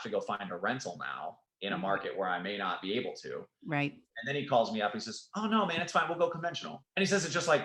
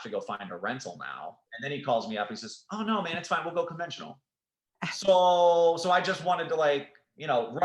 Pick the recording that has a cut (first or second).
second